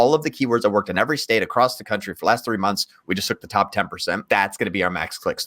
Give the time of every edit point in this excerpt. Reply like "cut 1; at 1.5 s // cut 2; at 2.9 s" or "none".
cut 1; at 4.2 s